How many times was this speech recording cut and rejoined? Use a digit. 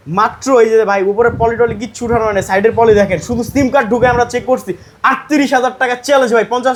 0